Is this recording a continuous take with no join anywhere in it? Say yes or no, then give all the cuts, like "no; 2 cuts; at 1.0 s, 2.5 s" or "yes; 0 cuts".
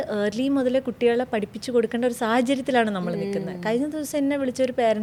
yes; 0 cuts